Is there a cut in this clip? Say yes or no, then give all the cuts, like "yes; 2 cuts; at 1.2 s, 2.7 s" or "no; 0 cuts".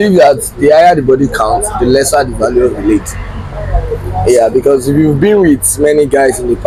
no; 0 cuts